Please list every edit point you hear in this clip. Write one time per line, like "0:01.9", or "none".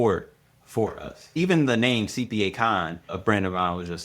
0:01.2